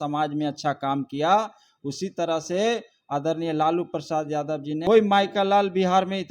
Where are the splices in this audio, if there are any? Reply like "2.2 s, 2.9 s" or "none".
4.8 s